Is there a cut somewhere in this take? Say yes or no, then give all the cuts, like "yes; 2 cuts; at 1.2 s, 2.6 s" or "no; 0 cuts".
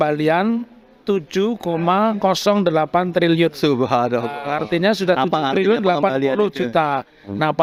no; 0 cuts